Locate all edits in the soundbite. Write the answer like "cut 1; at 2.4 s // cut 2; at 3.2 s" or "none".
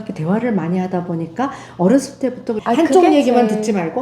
cut 1; at 2.6 s